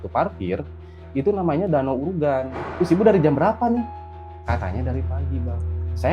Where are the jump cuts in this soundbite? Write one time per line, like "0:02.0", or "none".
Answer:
0:02.6